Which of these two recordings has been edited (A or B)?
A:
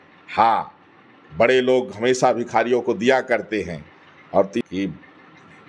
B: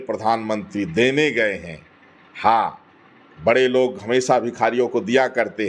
A